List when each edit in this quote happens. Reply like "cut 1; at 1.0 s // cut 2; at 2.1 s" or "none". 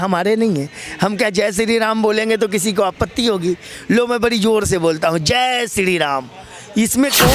none